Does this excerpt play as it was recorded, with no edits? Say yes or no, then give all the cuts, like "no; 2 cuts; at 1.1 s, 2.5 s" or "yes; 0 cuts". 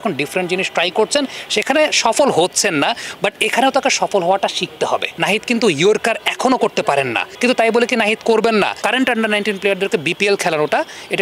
no; 3 cuts; at 5.1 s, 7.2 s, 8.8 s